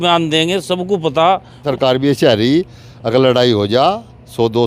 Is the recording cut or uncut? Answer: cut